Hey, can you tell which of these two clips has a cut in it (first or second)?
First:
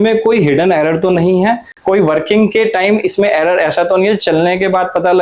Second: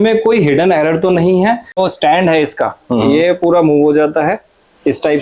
second